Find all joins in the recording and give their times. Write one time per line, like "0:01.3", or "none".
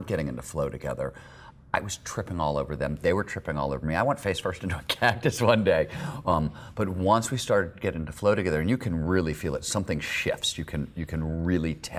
none